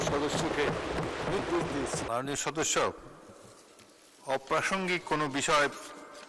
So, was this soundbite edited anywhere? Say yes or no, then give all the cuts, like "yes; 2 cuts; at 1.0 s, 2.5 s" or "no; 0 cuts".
yes; 1 cut; at 2.0 s